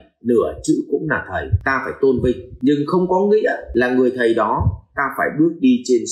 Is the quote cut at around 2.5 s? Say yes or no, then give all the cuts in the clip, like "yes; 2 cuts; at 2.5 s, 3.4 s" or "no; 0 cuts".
yes; 3 cuts; at 1.5 s, 2.5 s, 3.6 s